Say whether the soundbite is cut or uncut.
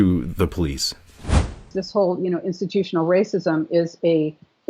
cut